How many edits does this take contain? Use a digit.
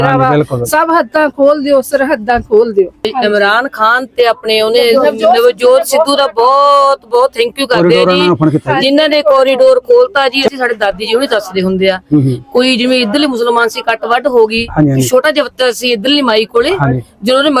2